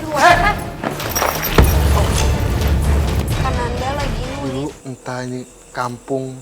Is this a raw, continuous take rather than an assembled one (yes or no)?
no